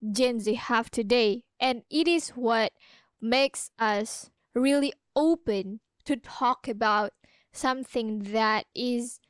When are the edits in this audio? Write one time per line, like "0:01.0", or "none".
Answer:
none